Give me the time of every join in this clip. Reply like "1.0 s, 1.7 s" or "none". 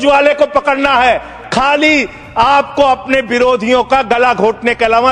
1.4 s